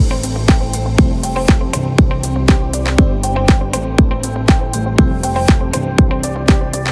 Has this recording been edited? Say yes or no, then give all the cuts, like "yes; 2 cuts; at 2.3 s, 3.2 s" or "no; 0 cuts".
no; 0 cuts